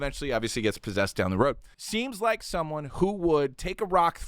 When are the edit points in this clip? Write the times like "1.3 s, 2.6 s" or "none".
2.0 s